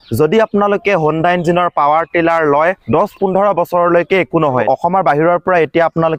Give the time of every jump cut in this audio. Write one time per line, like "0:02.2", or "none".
none